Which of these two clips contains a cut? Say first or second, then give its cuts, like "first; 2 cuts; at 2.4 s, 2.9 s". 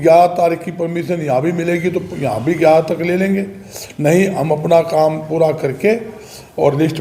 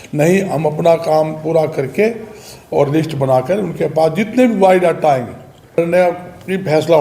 second; 1 cut; at 5.8 s